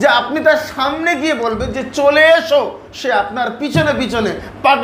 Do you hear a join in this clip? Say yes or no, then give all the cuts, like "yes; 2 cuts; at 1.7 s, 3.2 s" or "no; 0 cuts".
no; 0 cuts